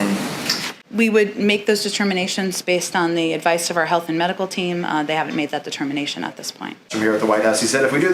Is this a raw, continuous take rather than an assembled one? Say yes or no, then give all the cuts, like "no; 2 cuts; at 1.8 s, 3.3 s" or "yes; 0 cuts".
no; 1 cut; at 6.9 s